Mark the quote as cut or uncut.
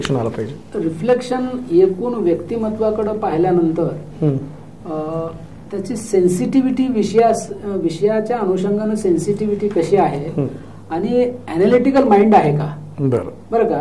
uncut